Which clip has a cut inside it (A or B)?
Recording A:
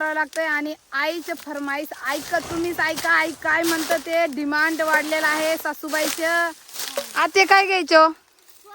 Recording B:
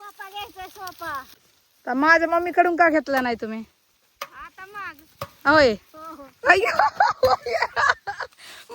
B